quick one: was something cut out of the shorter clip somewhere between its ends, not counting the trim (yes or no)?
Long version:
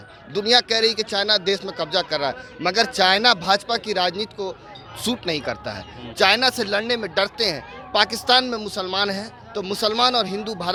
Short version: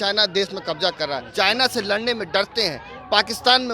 yes